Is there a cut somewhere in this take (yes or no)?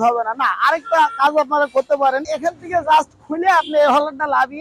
yes